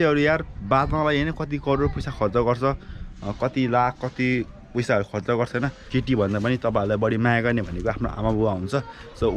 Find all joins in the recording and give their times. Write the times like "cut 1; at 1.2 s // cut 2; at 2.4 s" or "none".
cut 1; at 5.8 s